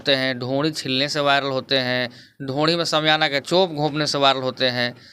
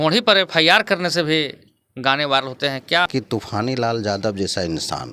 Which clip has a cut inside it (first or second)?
second